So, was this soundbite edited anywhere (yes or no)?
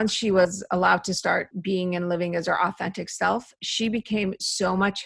yes